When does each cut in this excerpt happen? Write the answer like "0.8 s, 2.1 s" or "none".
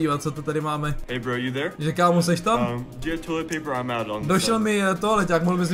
none